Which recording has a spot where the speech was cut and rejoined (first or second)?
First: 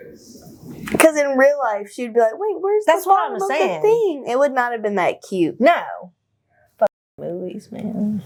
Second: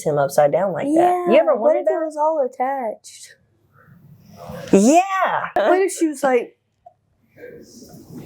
second